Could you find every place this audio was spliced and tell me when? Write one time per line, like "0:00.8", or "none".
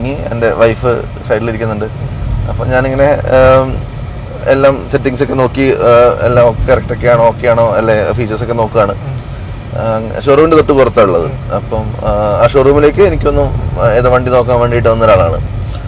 none